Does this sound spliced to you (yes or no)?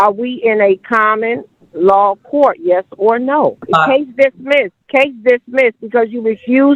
yes